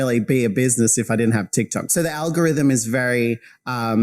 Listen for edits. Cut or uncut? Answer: cut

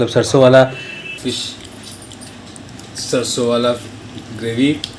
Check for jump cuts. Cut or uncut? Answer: cut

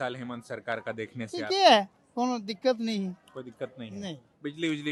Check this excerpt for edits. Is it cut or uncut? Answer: uncut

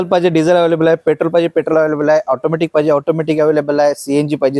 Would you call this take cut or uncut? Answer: uncut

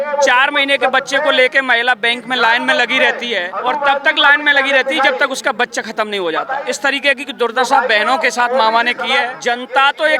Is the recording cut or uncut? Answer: cut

